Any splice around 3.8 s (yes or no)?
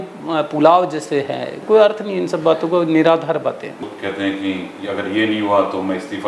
yes